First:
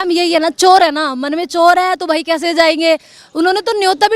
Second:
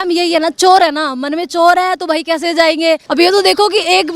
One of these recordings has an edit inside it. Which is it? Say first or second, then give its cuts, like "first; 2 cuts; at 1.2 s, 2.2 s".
second; 1 cut; at 3.1 s